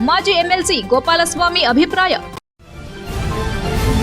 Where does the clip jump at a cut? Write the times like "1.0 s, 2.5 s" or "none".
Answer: 2.3 s